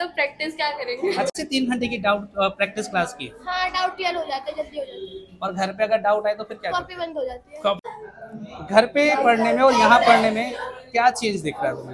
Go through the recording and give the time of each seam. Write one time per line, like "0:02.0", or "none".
0:01.4
0:07.9